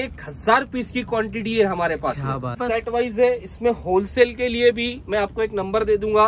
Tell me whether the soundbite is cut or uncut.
cut